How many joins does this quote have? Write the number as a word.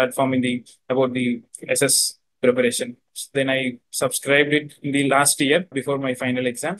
one